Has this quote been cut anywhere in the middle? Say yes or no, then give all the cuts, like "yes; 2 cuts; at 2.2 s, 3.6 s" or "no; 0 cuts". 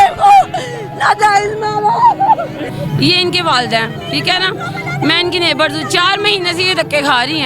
no; 0 cuts